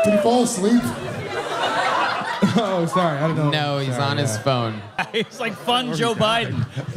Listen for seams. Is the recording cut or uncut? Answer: cut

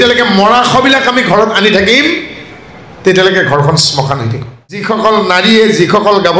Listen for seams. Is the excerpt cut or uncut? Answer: cut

